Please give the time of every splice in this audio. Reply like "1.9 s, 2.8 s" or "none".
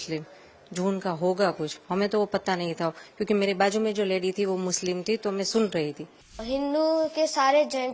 6.4 s